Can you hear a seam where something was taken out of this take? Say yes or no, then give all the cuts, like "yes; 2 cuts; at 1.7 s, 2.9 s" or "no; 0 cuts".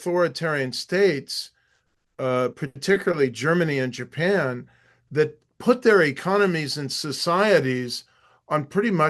no; 0 cuts